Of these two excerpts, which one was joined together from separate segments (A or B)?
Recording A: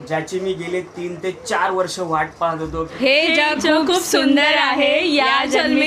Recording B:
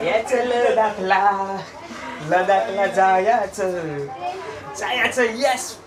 A